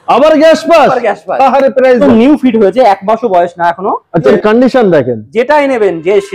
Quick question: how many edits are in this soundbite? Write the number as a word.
two